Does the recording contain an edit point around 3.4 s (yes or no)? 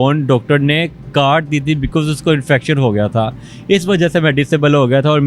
no